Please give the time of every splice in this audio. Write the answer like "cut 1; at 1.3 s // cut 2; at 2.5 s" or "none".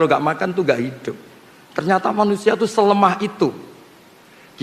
none